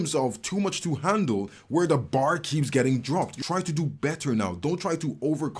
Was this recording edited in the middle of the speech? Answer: yes; 1 cut; at 3.3 s

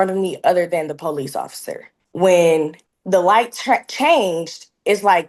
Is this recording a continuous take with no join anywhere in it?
yes; 0 cuts

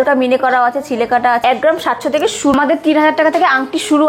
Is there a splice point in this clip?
yes; 2 cuts; at 1.4 s, 2.6 s

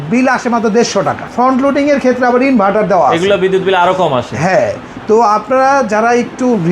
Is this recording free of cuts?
no; 1 cut; at 1.3 s

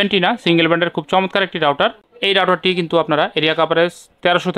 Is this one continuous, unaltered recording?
yes; 0 cuts

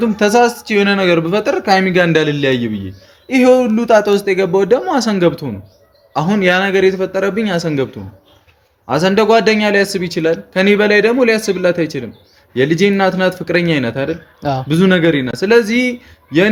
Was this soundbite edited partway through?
no; 0 cuts

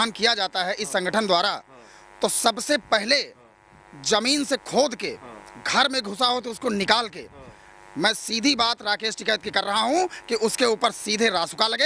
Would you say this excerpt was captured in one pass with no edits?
yes; 0 cuts

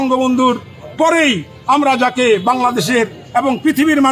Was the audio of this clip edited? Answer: no; 0 cuts

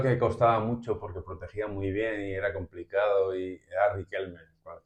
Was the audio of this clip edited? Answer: no; 0 cuts

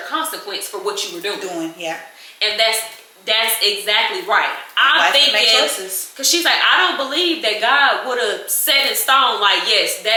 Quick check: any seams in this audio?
no; 0 cuts

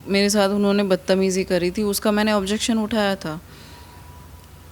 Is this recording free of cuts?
yes; 0 cuts

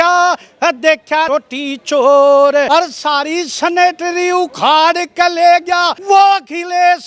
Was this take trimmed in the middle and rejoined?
yes; 3 cuts; at 1.3 s, 2.7 s, 5.9 s

